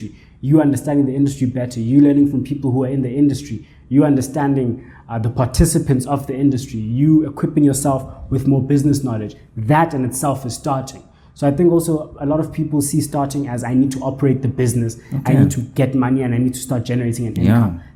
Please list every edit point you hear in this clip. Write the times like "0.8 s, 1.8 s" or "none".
none

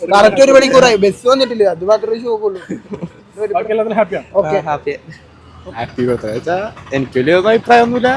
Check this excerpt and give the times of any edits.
none

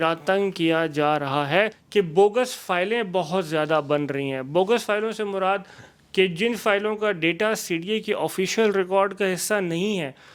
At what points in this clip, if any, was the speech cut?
1.8 s

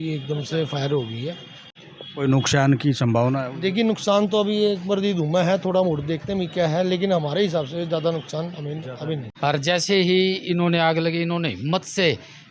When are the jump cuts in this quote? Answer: 1.6 s, 9.3 s

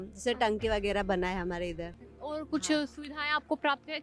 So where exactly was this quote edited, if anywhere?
none

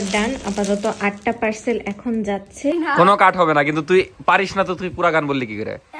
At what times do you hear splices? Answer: 2.7 s

